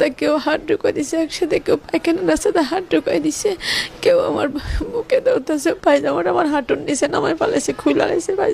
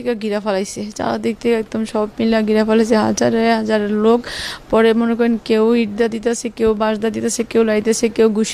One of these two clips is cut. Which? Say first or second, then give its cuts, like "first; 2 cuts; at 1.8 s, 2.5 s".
first; 1 cut; at 5.8 s